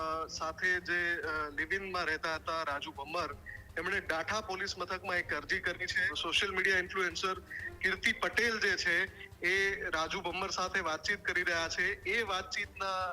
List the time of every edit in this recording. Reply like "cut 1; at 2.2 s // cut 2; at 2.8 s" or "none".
cut 1; at 6.2 s